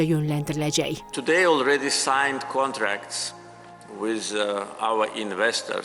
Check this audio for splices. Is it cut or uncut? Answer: cut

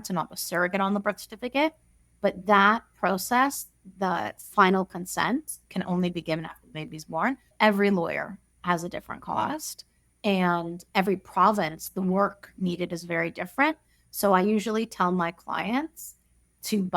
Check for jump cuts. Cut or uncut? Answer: cut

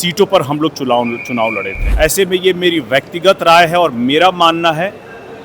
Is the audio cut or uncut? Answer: cut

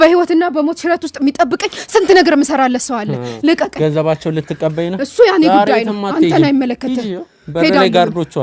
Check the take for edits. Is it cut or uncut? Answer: uncut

